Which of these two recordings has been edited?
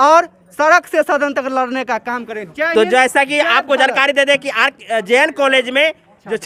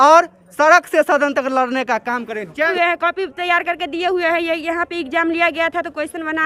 second; 1 cut; at 2.7 s

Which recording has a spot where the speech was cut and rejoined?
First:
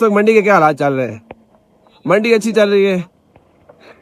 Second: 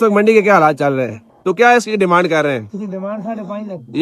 second; 1 cut; at 1.3 s

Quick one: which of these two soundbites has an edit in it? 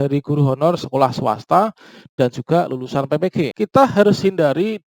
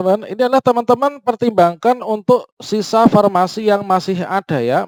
first; 1 cut; at 3.5 s

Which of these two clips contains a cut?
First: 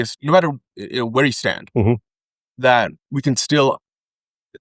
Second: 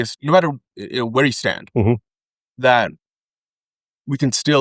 first; 1 cut; at 3.0 s

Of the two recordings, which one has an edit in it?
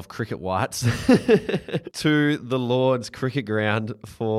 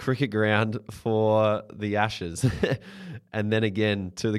first; 1 cut; at 1.8 s

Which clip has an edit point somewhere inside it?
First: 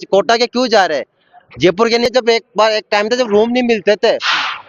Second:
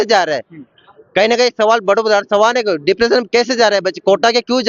first; 1 cut; at 2.0 s

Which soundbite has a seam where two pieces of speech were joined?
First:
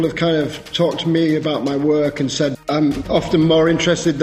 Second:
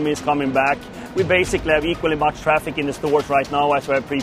first; 1 cut; at 2.9 s

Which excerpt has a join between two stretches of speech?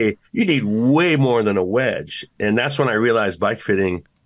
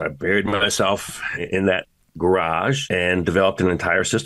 second; 2 cuts; at 1.4 s, 2.8 s

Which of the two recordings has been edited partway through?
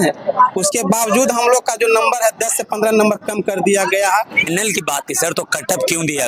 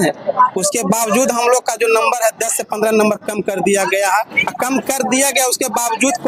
first; 1 cut; at 4.4 s

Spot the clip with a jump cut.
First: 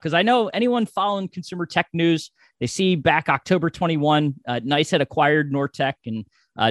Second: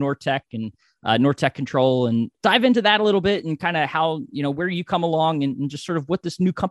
second; 1 cut; at 2.3 s

